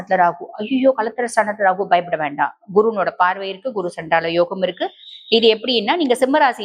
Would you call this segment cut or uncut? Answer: uncut